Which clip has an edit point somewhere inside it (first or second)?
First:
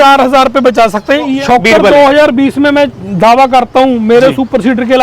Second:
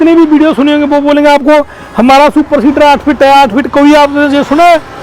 first